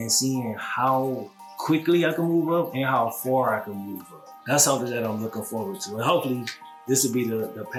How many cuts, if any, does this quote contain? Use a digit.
0